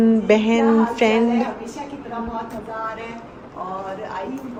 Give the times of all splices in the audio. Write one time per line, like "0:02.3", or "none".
none